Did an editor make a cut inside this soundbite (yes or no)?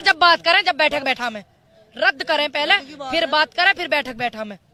no